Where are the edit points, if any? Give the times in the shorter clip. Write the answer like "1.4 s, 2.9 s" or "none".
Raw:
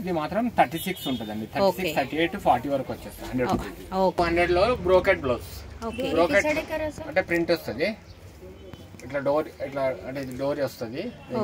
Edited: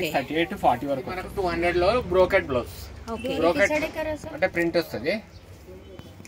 1.4 s